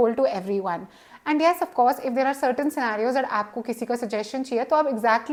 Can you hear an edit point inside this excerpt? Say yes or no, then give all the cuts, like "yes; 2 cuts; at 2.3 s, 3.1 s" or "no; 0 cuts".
no; 0 cuts